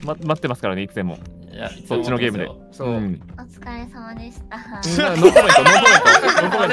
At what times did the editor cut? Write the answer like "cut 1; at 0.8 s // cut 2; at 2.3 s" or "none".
none